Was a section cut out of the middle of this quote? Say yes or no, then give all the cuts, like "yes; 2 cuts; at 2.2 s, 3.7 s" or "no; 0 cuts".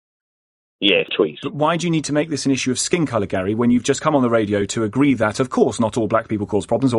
yes; 1 cut; at 1.1 s